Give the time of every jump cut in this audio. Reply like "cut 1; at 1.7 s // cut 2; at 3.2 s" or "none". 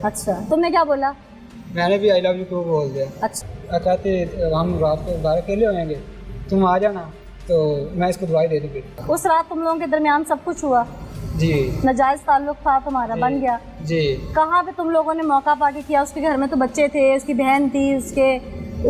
cut 1; at 3.4 s // cut 2; at 8.9 s